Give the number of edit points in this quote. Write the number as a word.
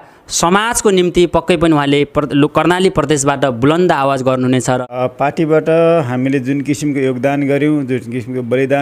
one